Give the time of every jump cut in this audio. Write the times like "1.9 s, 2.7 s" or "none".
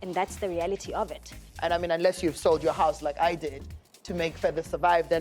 1.4 s

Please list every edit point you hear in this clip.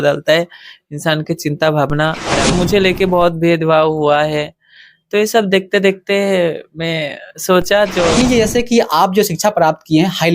2.5 s, 8.2 s

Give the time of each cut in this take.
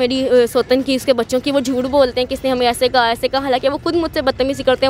none

